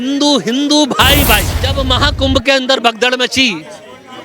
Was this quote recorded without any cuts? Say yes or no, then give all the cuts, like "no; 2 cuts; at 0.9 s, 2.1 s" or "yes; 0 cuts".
no; 1 cut; at 1.6 s